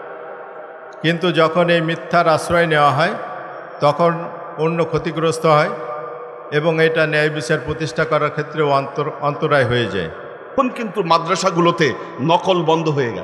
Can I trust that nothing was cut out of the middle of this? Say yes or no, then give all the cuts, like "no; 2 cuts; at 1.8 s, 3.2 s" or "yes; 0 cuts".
no; 1 cut; at 10.5 s